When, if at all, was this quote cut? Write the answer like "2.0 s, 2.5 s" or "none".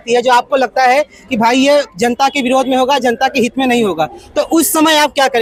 none